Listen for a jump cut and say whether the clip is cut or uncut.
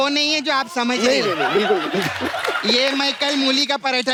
uncut